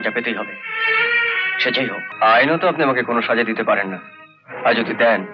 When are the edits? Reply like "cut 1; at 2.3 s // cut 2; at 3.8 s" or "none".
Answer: cut 1; at 2.1 s

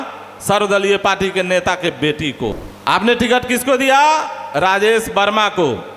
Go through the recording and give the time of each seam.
cut 1; at 2.7 s

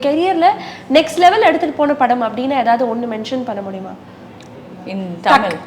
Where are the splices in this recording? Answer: none

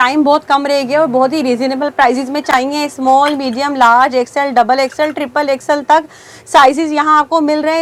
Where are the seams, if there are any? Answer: none

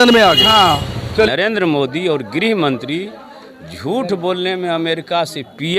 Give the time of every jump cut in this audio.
cut 1; at 1.3 s

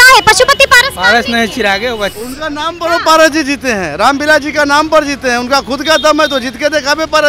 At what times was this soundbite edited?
cut 1; at 2.1 s

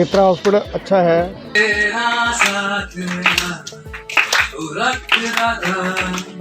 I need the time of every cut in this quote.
cut 1; at 1.5 s

